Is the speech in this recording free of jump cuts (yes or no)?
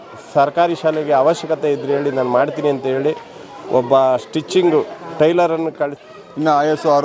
no